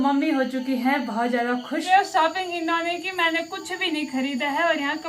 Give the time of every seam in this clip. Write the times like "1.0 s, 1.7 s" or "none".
1.8 s